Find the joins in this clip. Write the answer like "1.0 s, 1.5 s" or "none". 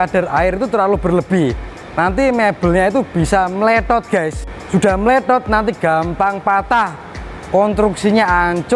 none